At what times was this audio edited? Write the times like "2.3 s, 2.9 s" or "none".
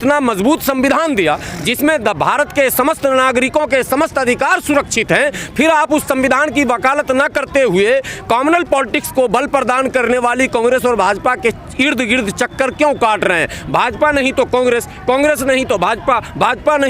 none